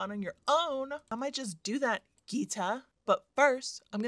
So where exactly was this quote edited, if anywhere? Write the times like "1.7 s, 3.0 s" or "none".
1.0 s, 2.9 s